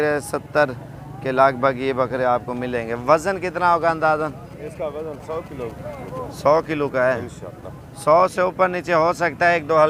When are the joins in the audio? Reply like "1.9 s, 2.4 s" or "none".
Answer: none